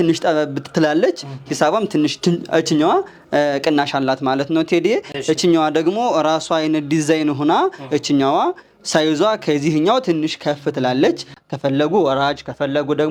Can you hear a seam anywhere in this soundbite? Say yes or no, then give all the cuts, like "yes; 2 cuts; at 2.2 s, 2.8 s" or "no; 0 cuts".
no; 0 cuts